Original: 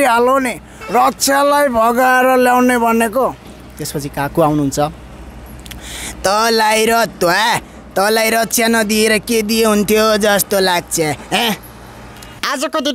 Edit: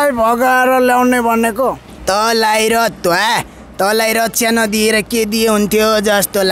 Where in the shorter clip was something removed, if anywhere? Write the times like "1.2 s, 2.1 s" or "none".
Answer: 1.9 s